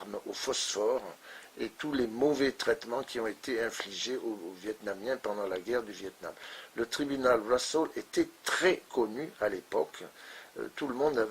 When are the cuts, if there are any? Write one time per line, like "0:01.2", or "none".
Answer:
0:07.0

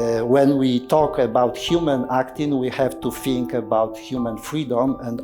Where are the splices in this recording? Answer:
none

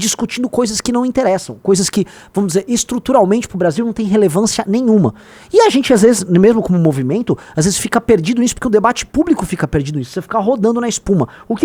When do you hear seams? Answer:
none

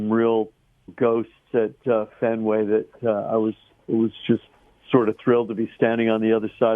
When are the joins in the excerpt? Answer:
0:00.9

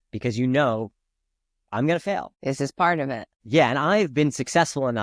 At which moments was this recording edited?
0:02.3
0:03.3

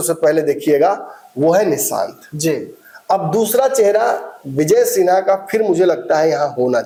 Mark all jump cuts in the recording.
none

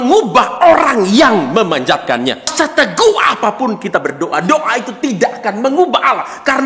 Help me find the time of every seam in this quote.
0:02.5

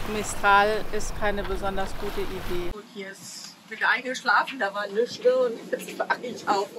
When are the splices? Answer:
0:02.8

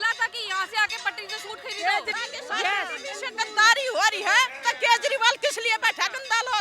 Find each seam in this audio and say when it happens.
0:02.1

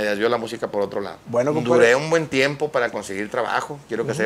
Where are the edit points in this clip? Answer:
0:01.7

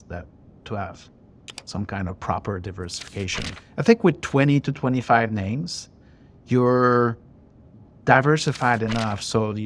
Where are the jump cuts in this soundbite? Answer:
none

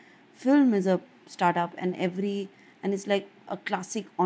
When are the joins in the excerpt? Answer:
none

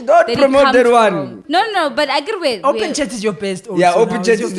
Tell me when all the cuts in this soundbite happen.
0:01.4

